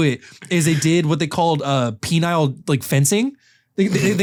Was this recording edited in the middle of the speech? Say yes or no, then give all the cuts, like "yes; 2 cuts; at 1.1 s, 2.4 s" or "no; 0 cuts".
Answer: no; 0 cuts